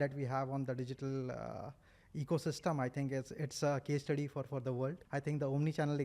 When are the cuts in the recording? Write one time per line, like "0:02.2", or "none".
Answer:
0:05.0